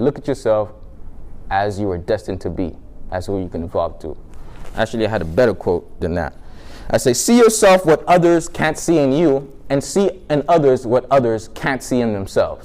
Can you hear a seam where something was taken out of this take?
no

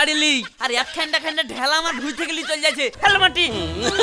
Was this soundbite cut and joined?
yes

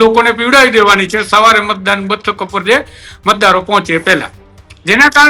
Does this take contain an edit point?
no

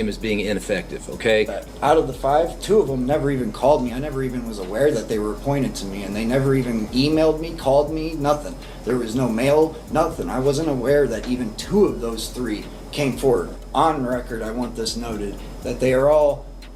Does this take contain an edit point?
yes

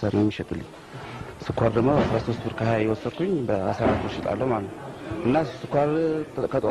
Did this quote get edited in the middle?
no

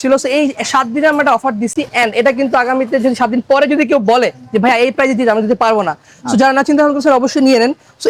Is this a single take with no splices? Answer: yes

